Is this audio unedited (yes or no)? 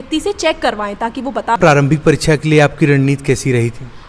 no